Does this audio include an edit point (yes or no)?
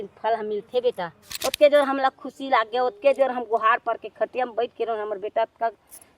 yes